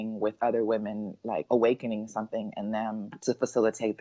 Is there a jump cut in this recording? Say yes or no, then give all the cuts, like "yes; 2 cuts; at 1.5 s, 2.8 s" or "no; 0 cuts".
yes; 2 cuts; at 1.4 s, 3.1 s